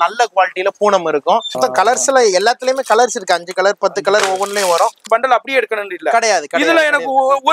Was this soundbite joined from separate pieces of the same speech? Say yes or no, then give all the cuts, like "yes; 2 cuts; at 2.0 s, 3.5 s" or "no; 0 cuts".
yes; 2 cuts; at 1.6 s, 5.0 s